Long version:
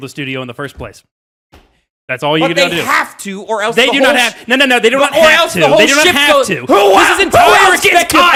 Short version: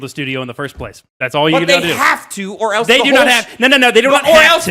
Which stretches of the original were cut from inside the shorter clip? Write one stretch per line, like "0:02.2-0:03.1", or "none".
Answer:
0:01.0-0:01.9